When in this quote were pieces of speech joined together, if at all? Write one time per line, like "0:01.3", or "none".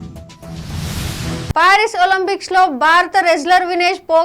0:01.5

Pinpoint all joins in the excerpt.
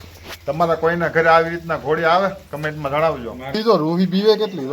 0:03.6

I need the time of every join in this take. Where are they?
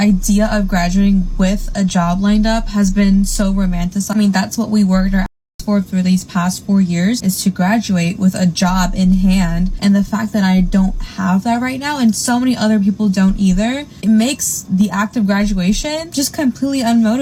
none

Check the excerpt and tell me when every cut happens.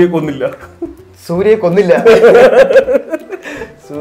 none

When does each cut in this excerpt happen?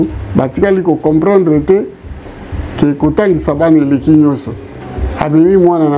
none

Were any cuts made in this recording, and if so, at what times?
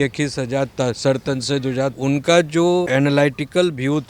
0:02.0
0:02.9

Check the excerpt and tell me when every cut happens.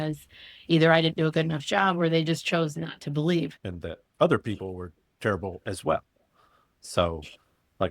0:03.6

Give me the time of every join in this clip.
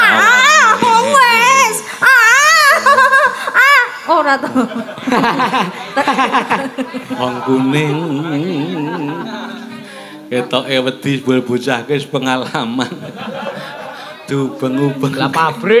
none

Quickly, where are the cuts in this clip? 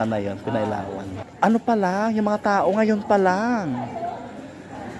0:01.2

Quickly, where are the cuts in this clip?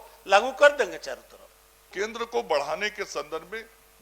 0:01.9

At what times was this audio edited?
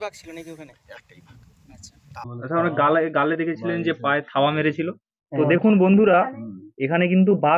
0:02.2

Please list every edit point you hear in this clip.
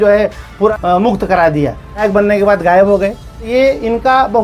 0:00.7
0:02.0
0:03.5

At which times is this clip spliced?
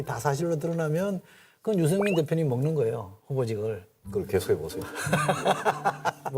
none

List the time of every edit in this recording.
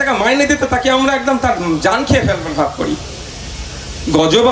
none

